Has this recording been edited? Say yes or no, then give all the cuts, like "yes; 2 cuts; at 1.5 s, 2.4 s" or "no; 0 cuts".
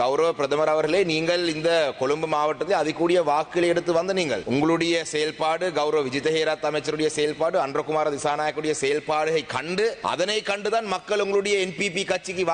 yes; 2 cuts; at 4.4 s, 10.0 s